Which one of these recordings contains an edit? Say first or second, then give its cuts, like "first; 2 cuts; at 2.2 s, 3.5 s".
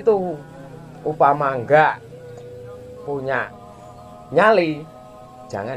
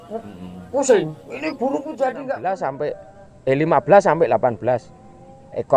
second; 1 cut; at 2.3 s